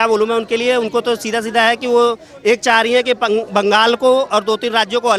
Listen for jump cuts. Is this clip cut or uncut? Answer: uncut